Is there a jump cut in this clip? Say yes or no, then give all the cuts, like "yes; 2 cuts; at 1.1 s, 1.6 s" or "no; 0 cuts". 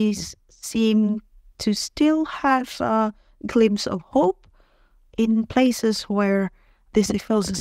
no; 0 cuts